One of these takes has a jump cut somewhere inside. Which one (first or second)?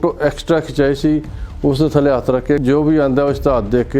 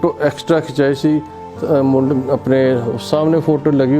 first